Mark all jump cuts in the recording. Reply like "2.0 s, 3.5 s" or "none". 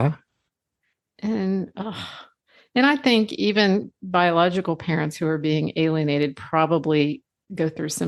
none